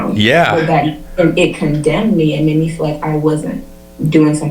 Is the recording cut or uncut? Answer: uncut